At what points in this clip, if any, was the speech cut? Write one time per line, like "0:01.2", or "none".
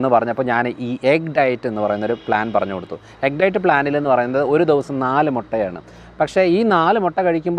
none